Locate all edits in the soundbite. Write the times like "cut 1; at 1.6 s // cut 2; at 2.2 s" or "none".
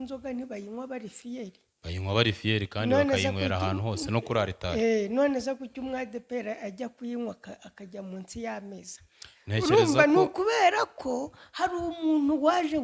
none